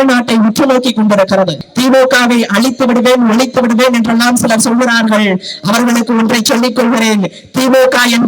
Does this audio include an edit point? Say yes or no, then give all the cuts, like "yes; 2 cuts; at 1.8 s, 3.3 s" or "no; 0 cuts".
yes; 1 cut; at 1.6 s